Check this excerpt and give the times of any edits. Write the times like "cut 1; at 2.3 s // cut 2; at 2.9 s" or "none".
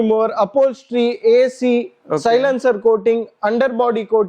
none